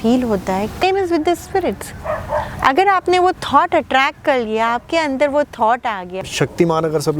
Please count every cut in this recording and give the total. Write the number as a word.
two